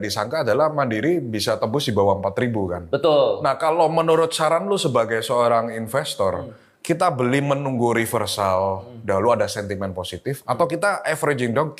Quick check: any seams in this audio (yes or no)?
no